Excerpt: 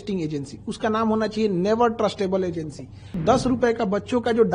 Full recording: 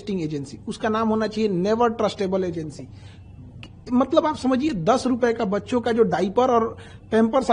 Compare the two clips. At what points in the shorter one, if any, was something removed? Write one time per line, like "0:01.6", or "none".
0:03.2